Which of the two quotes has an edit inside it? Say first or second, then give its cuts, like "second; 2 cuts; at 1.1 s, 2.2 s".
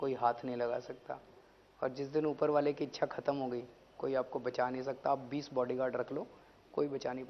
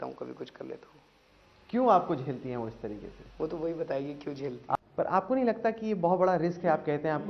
second; 1 cut; at 4.8 s